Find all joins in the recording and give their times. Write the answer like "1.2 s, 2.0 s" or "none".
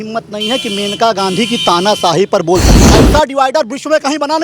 2.8 s